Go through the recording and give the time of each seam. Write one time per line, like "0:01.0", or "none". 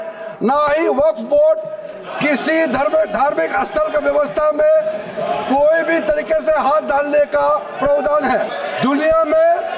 0:08.5